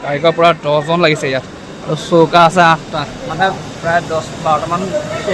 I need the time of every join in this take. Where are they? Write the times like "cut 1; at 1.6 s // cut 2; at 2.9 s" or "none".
none

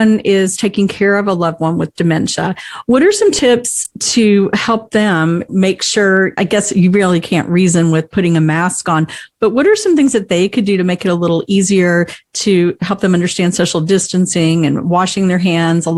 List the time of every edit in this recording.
none

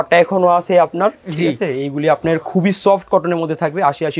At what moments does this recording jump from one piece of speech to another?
none

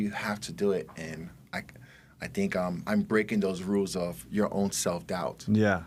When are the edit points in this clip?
none

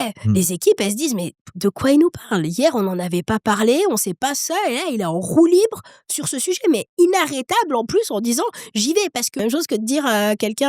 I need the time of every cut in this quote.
cut 1; at 9.4 s

